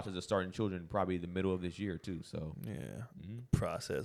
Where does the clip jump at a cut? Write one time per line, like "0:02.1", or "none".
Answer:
none